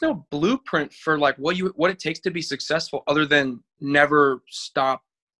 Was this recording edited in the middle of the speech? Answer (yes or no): no